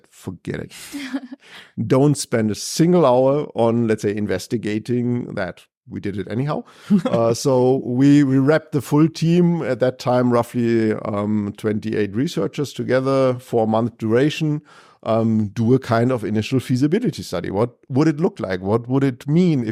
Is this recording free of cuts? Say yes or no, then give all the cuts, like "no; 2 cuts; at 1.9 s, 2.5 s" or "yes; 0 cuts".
yes; 0 cuts